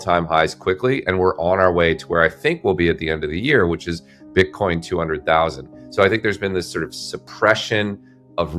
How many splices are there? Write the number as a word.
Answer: zero